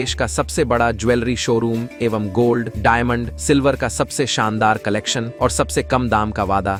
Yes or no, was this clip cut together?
no